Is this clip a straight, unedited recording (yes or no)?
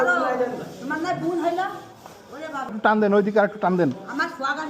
no